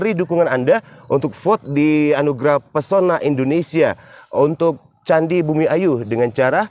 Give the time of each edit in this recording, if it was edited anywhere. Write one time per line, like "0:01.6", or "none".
none